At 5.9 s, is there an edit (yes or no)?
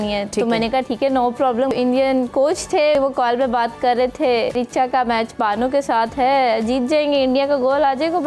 no